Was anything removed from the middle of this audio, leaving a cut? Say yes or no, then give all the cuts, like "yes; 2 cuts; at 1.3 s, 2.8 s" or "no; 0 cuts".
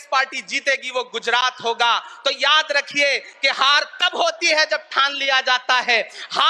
no; 0 cuts